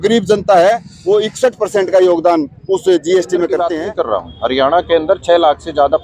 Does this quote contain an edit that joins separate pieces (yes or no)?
yes